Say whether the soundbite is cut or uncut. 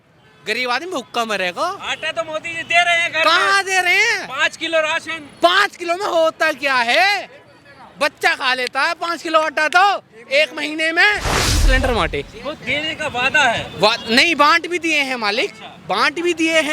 cut